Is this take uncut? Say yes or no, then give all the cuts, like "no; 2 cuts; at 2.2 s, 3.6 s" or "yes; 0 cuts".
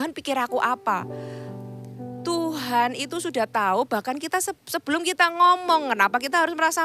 yes; 0 cuts